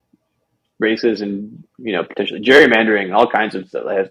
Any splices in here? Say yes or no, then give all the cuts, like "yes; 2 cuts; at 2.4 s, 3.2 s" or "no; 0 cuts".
no; 0 cuts